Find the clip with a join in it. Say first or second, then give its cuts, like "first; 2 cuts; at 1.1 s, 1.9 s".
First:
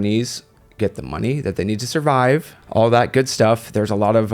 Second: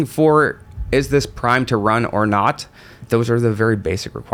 first; 1 cut; at 2.6 s